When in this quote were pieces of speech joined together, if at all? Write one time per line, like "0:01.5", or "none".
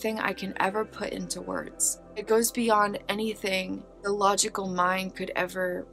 0:02.2
0:03.9